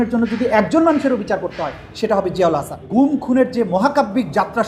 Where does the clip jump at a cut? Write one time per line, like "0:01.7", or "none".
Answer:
0:02.9